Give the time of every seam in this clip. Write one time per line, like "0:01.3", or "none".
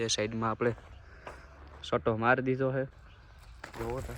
0:03.0